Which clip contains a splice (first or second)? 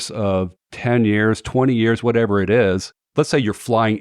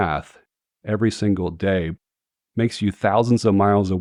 first